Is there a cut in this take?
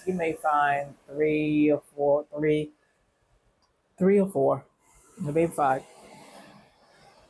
no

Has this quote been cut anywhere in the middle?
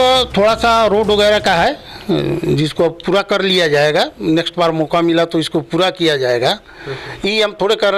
no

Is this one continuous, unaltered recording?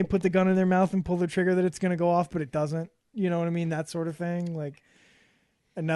yes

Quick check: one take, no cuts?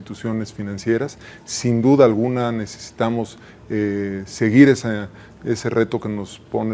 yes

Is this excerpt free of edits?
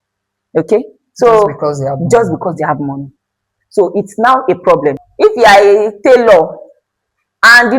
no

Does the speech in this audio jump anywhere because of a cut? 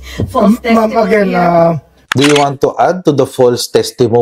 yes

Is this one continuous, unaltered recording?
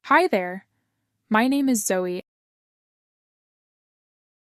yes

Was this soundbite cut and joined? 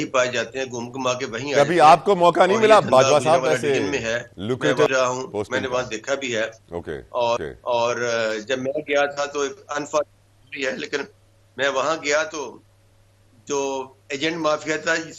no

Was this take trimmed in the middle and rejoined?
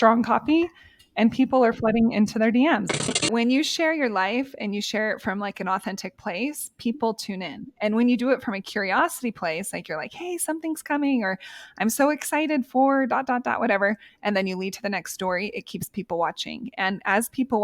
yes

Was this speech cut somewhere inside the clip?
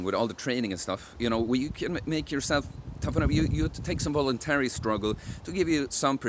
no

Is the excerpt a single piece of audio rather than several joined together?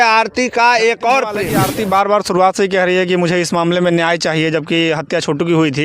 no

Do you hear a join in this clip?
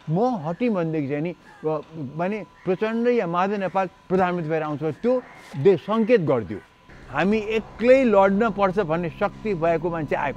yes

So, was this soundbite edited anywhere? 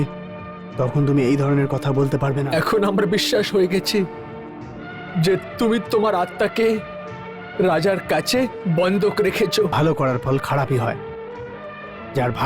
yes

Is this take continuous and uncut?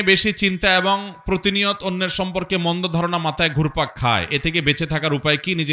yes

